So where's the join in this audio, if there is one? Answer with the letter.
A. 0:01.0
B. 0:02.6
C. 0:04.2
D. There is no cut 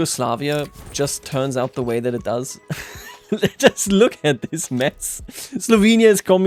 D